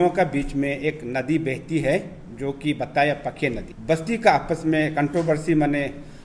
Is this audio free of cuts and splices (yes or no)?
no